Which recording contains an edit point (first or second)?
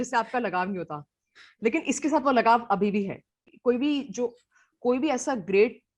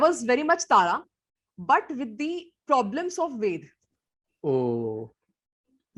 first